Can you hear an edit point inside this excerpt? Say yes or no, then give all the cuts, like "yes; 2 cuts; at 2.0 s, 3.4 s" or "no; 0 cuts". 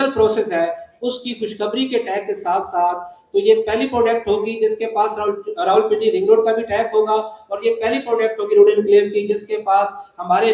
no; 0 cuts